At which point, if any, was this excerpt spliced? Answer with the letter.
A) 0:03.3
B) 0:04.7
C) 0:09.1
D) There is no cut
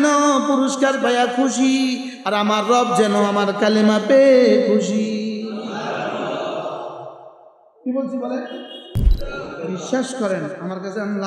C